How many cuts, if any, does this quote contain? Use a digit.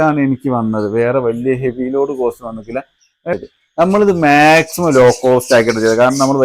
1